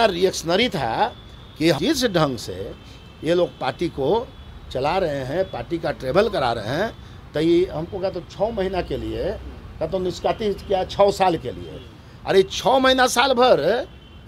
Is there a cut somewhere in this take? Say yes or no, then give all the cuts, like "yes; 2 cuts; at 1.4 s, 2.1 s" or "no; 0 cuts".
yes; 1 cut; at 1.8 s